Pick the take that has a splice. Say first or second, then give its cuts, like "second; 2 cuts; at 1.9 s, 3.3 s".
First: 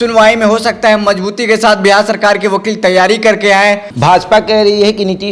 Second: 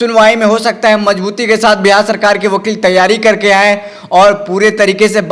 first; 1 cut; at 3.9 s